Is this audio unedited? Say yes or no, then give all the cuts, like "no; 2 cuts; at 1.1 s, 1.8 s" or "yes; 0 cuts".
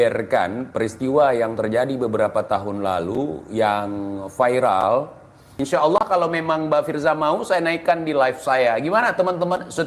no; 1 cut; at 5.5 s